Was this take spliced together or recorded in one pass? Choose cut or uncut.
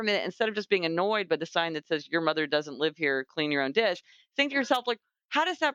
uncut